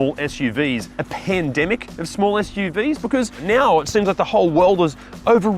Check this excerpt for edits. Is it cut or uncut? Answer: cut